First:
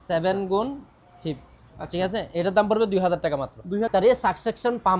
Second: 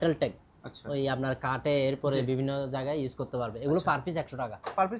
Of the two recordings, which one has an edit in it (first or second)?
first